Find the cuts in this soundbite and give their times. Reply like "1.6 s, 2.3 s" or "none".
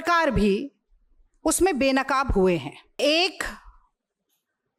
3.0 s